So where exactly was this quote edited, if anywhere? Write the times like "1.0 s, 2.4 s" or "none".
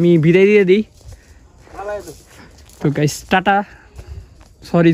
none